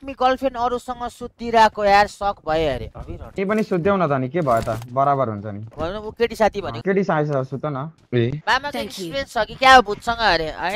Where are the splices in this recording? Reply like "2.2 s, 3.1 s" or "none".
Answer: 2.9 s, 5.6 s, 8.4 s